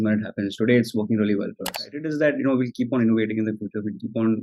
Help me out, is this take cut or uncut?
cut